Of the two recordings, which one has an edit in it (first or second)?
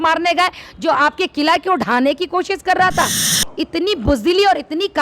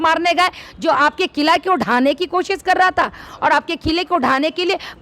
first